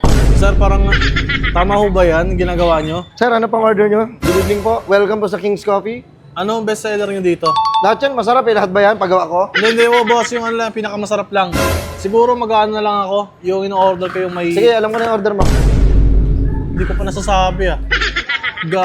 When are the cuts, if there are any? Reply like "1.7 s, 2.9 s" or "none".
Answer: none